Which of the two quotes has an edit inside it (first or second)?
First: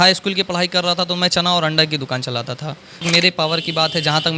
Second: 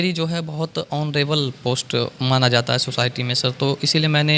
first